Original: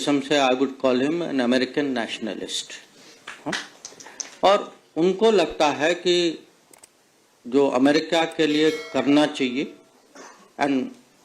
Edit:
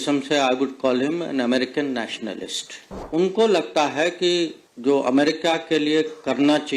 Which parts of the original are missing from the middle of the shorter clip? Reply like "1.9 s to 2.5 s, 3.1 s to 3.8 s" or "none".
2.9 s to 4.8 s, 6.5 s to 7.3 s